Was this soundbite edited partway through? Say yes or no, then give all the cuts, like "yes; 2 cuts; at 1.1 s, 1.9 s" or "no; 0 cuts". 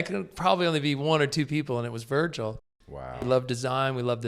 yes; 1 cut; at 3.1 s